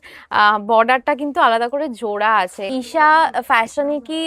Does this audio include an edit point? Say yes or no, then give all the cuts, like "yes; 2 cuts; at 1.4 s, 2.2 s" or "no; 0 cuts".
yes; 1 cut; at 2.7 s